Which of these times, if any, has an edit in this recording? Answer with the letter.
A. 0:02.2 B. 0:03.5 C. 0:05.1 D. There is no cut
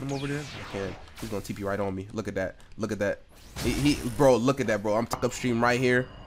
C